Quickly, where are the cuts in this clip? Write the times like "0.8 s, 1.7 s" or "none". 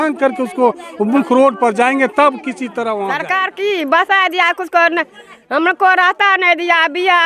3.2 s